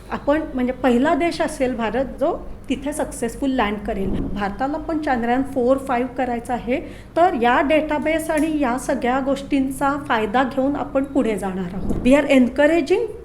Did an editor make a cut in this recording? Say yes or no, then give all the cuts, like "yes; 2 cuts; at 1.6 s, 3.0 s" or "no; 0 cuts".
yes; 2 cuts; at 4.2 s, 11.9 s